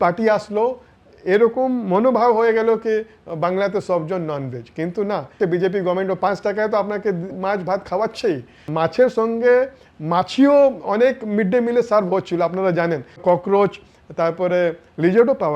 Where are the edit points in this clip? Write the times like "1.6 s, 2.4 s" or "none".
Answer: 5.4 s, 8.7 s, 13.2 s